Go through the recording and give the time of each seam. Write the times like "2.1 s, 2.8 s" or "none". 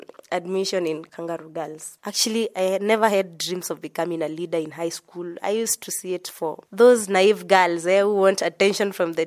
1.7 s